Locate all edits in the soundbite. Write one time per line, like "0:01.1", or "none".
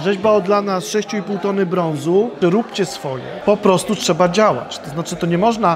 0:02.3
0:03.3